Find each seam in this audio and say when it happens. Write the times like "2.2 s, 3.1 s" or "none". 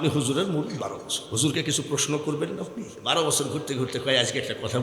1.1 s, 2.9 s